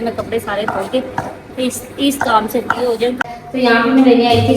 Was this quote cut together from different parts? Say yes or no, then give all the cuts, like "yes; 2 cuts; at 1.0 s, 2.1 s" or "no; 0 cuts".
yes; 1 cut; at 3.3 s